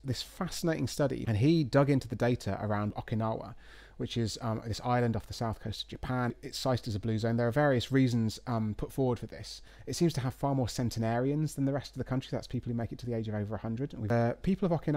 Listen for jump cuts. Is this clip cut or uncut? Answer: cut